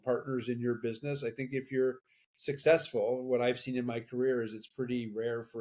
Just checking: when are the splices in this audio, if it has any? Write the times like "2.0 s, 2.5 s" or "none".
none